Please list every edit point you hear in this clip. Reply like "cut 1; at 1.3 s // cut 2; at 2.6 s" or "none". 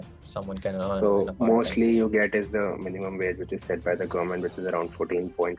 none